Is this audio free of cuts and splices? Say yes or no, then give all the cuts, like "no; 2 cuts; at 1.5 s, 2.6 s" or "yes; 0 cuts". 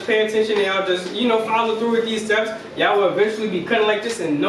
yes; 0 cuts